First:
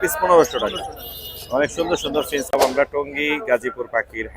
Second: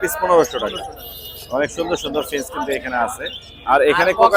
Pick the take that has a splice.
first; 1 cut; at 2.5 s

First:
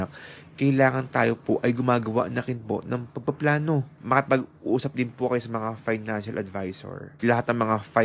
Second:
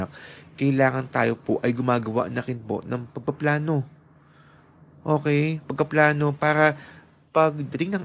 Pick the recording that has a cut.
first; 2 cuts; at 3.9 s, 7.1 s

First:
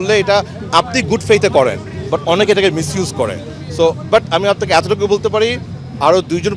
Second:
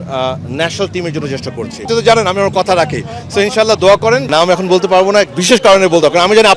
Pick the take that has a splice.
second; 2 cuts; at 1.8 s, 4.2 s

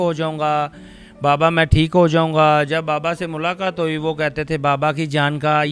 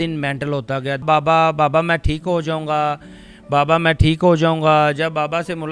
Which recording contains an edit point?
second; 1 cut; at 1.0 s

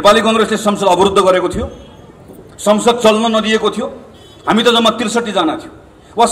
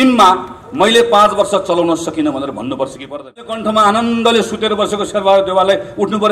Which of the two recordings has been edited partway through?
second; 1 cut; at 3.6 s

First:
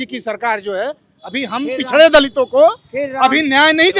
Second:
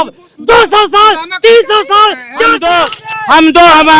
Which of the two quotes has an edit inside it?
second; 1 cut; at 2.6 s

